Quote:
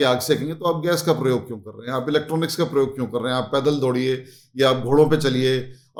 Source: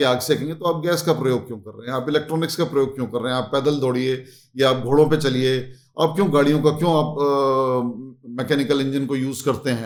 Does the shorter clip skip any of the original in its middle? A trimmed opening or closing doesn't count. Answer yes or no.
no